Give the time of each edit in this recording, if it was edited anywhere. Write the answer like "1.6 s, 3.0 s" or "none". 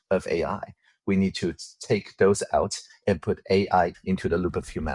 3.9 s